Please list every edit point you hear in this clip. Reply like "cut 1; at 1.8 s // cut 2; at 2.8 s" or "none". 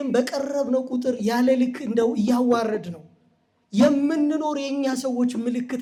none